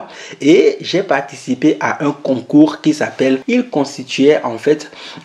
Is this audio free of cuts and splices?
no; 1 cut; at 3.4 s

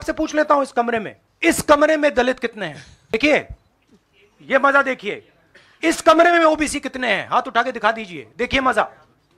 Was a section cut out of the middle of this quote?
yes; 2 cuts; at 1.2 s, 3.1 s

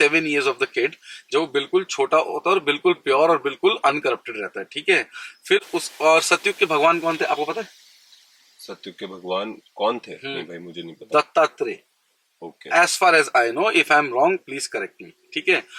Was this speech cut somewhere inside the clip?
no; 0 cuts

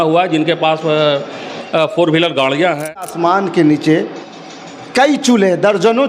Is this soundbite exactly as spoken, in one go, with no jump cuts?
no; 1 cut; at 3.1 s

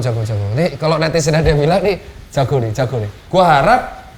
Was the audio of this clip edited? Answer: yes; 1 cut; at 3.1 s

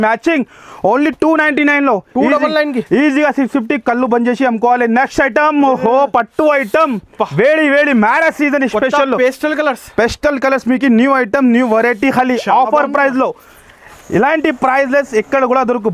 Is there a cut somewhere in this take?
no; 0 cuts

